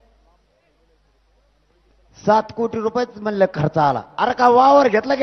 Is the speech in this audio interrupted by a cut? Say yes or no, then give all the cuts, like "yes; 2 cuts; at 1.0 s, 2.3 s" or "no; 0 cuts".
no; 0 cuts